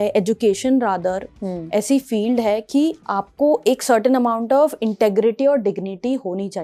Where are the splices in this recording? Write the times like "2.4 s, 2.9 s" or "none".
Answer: none

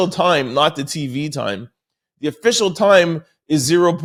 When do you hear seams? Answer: none

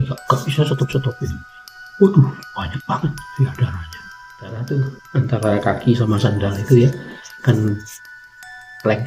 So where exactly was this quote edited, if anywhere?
4.6 s

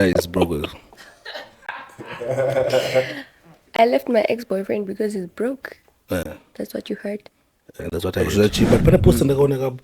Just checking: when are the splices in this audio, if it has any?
8.2 s

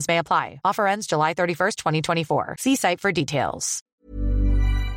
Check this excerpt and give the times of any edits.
3.8 s

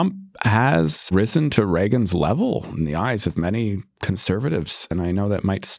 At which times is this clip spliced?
1.1 s, 4.9 s

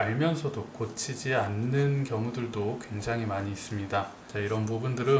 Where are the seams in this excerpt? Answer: 4.2 s

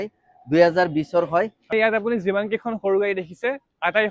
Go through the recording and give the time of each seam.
1.6 s

